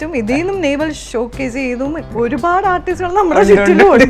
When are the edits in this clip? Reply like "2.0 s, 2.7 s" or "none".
1.0 s, 2.1 s